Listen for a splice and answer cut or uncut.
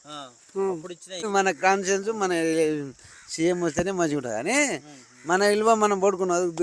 cut